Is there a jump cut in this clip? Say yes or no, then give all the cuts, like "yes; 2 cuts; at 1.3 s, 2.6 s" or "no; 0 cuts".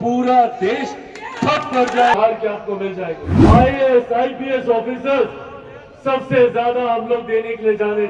yes; 1 cut; at 3.2 s